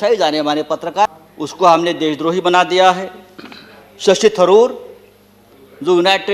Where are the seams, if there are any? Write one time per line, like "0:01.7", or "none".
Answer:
0:01.2